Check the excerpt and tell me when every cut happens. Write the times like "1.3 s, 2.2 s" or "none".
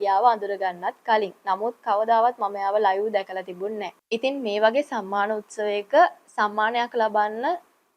3.9 s